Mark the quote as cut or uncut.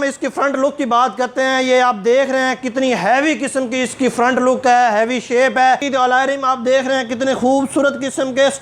cut